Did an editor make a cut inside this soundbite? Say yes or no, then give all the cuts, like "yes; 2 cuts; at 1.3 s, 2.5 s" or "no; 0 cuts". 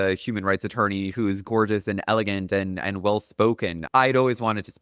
no; 0 cuts